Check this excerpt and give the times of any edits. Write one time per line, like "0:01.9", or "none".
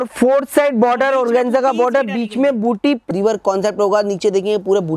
0:03.1